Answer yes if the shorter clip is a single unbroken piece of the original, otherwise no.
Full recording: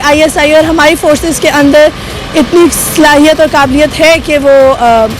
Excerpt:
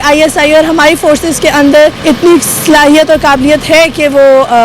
no